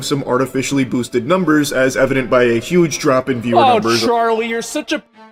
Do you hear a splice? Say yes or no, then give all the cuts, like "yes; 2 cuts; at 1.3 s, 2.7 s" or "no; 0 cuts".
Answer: no; 0 cuts